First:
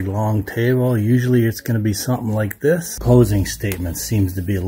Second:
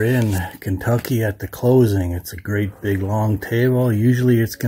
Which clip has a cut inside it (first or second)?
first